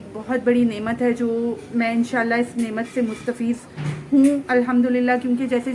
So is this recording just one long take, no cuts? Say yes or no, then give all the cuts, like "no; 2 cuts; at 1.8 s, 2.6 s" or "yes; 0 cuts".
yes; 0 cuts